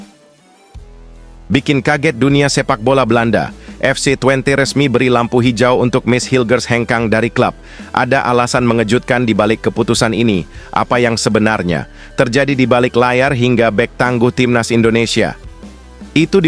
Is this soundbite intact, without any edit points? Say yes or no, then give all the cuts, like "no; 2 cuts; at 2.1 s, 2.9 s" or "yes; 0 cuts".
no; 1 cut; at 1.3 s